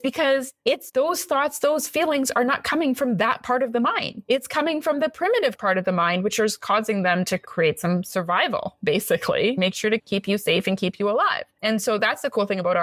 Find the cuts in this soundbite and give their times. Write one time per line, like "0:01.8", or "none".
none